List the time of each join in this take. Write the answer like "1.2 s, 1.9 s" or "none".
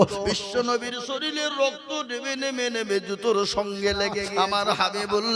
4.2 s